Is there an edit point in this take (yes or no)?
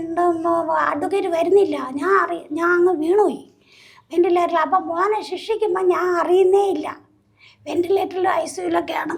no